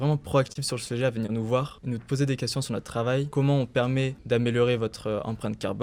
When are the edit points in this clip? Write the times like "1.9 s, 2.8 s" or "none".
1.8 s, 4.2 s

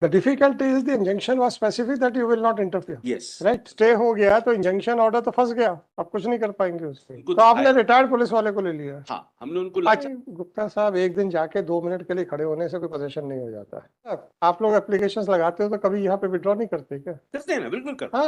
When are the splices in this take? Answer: 3.7 s, 7.1 s, 10.0 s, 14.3 s

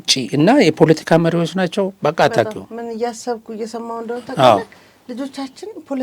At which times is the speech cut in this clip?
none

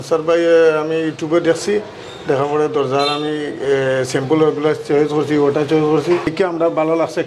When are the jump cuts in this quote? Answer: 6.3 s

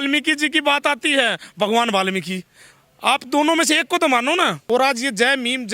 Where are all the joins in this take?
4.6 s

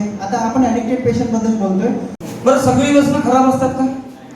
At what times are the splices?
2.2 s

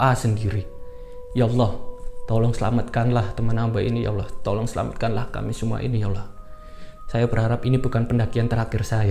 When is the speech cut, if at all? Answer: none

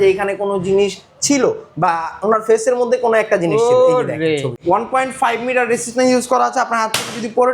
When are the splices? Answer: 4.6 s

